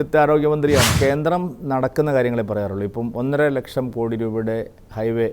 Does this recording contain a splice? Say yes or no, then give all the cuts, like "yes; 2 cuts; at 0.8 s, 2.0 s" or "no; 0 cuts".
yes; 1 cut; at 1.0 s